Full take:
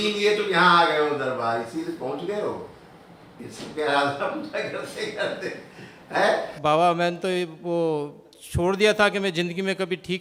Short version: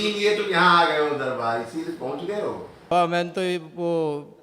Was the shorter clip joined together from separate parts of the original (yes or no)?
yes